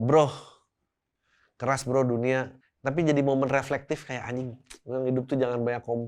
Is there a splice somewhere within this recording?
yes; 1 cut; at 2.5 s

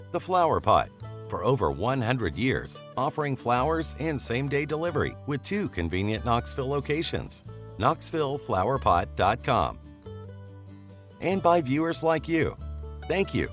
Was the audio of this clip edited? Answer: yes; 1 cut; at 11.2 s

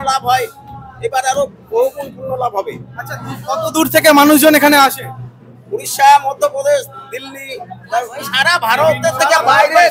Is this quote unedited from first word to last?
yes; 0 cuts

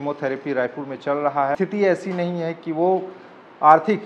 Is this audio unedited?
no; 1 cut; at 1.6 s

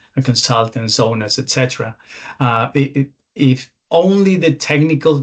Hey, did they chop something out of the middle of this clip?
no; 0 cuts

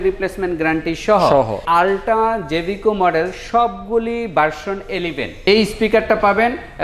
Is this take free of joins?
no; 2 cuts; at 1.6 s, 5.4 s

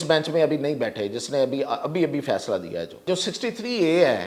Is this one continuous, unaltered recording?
no; 1 cut; at 3.1 s

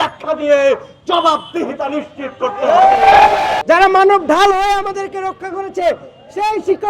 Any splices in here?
yes; 1 cut; at 3.6 s

